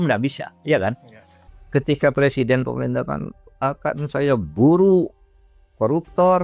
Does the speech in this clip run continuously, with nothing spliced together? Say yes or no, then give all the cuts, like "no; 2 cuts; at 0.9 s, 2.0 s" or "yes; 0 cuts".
no; 1 cut; at 1.4 s